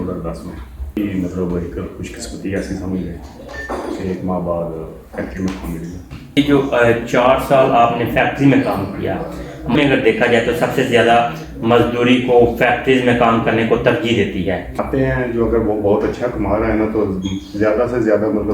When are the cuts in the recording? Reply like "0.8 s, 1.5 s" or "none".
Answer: 1.0 s, 6.4 s, 9.7 s, 14.7 s